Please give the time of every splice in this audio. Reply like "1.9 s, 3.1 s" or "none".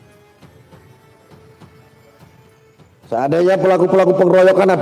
3.1 s